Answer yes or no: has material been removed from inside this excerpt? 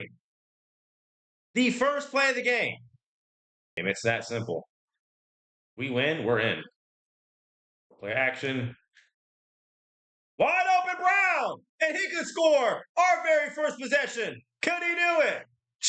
yes